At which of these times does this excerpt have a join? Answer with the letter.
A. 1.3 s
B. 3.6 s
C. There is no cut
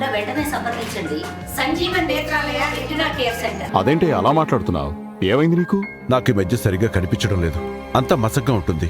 B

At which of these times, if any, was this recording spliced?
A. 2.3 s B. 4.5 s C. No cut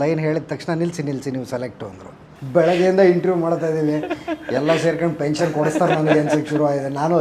A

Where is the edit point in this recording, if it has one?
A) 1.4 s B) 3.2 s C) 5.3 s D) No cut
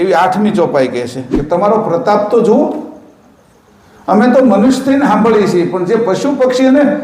A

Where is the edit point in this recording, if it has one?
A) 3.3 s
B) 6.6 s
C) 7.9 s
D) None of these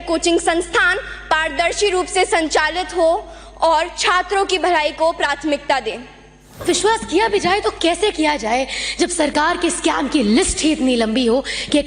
B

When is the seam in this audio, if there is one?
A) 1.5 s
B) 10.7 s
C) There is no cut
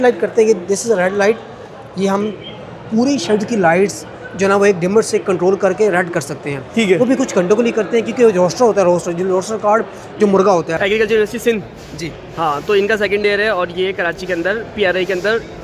B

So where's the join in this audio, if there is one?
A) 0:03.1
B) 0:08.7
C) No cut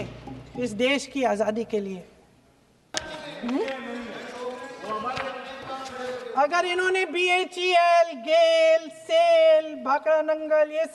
A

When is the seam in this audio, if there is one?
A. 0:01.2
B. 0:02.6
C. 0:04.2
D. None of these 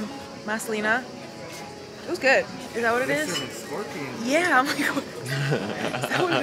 B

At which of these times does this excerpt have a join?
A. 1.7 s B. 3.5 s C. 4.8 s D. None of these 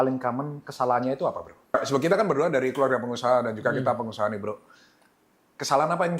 A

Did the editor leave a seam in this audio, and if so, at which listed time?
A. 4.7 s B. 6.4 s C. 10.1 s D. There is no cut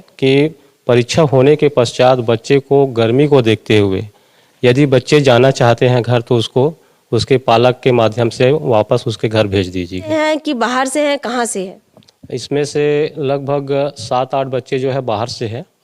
C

